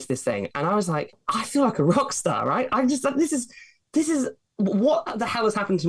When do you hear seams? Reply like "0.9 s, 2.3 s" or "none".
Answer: 1.2 s